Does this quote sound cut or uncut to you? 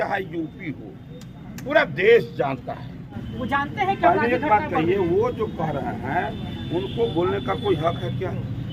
cut